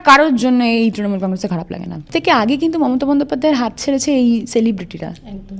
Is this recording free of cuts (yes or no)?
no